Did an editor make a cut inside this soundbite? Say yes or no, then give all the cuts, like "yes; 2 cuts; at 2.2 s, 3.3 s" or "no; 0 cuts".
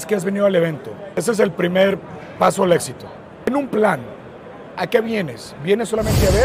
yes; 2 cuts; at 1.2 s, 3.5 s